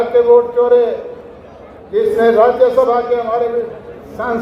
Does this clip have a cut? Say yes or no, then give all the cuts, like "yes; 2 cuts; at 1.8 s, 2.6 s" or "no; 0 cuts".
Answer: no; 0 cuts